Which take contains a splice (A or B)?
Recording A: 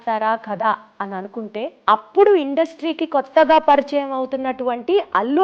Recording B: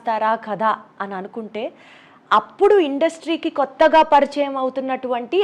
A